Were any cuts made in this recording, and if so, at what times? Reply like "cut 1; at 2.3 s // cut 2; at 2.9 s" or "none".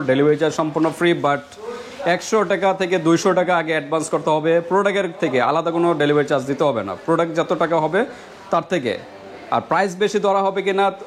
none